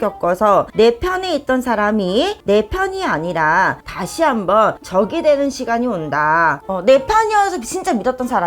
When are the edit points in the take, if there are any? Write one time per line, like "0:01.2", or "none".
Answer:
0:06.7